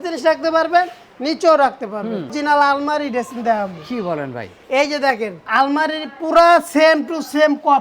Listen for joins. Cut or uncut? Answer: cut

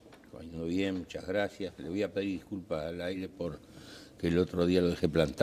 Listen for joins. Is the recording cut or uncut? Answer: uncut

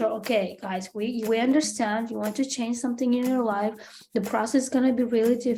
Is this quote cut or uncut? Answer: uncut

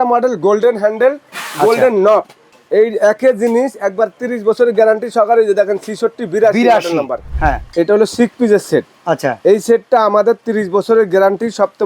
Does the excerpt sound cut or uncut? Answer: cut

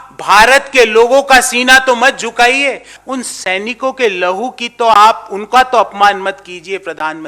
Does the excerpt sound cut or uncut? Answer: cut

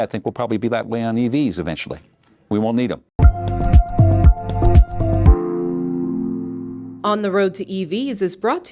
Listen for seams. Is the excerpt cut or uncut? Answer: cut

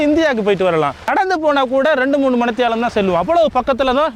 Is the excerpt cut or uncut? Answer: cut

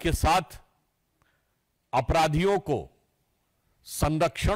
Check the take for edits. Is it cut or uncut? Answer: uncut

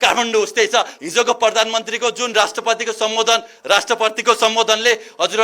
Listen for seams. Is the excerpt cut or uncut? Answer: cut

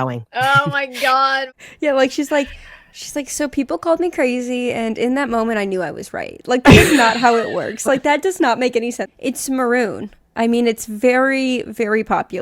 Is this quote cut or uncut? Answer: cut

